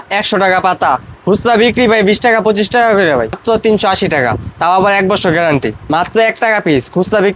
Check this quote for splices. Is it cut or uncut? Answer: cut